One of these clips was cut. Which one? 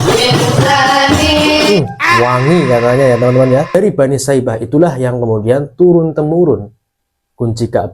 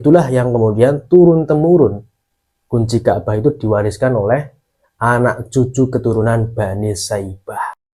first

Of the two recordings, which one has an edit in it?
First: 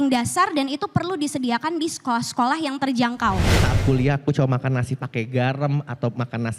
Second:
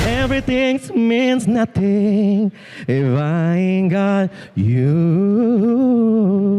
first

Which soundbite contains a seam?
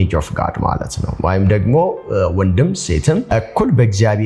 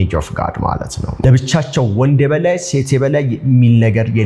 second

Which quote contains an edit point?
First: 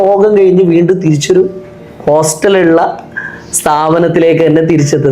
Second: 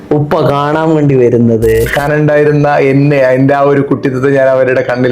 second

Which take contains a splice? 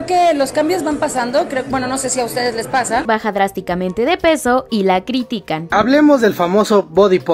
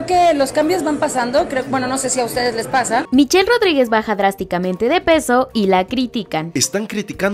first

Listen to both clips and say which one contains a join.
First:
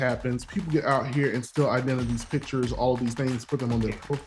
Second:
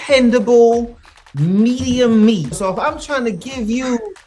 second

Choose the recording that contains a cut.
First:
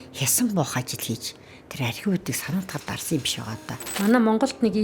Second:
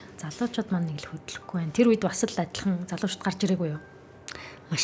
first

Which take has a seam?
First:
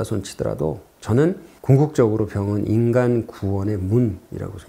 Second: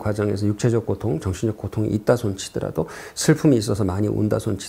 first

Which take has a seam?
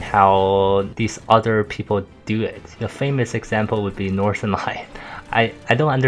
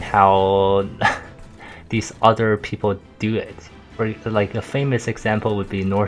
first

